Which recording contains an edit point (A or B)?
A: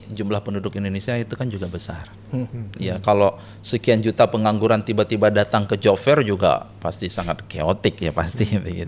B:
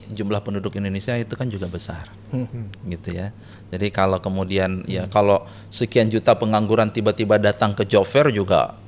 A